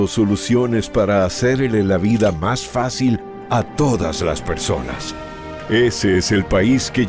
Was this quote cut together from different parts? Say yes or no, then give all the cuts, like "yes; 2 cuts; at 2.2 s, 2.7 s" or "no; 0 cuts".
no; 0 cuts